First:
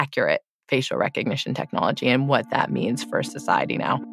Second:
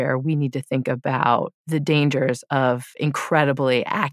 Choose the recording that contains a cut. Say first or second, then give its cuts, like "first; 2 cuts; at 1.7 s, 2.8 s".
second; 2 cuts; at 1.6 s, 2.9 s